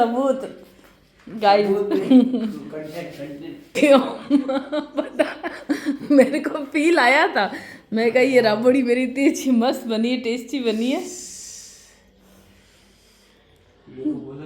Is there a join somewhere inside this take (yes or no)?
yes